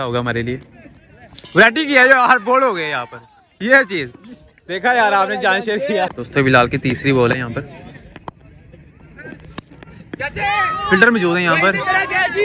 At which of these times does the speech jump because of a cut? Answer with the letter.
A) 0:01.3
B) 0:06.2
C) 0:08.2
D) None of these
B